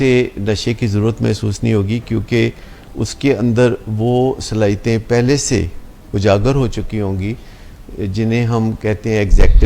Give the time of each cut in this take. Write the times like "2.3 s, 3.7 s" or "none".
none